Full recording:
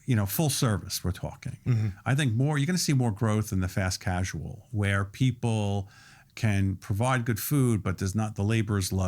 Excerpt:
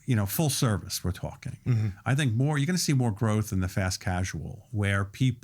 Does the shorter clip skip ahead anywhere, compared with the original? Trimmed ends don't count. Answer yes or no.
no